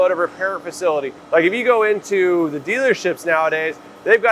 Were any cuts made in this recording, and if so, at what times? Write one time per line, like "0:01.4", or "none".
0:01.2